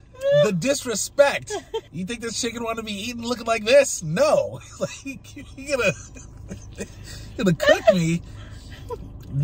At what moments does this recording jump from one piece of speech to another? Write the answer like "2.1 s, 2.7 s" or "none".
1.9 s